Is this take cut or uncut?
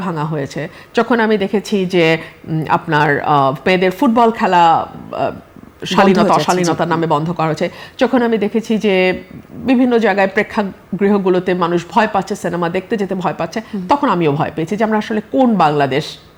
uncut